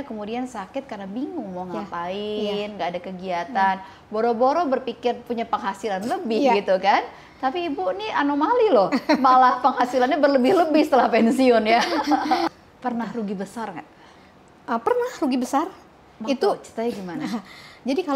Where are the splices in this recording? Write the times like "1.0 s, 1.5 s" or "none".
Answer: 12.5 s